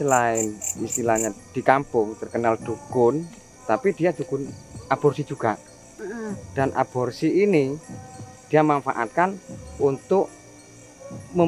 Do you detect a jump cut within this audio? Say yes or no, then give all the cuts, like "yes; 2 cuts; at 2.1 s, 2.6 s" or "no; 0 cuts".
no; 0 cuts